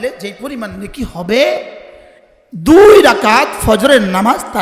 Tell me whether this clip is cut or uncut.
uncut